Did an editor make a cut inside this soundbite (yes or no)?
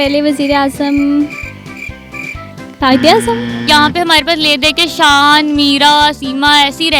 yes